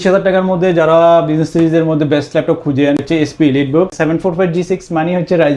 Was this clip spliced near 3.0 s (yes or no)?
yes